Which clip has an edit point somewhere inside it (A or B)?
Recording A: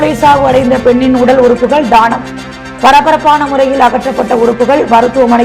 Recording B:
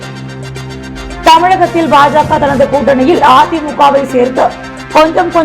B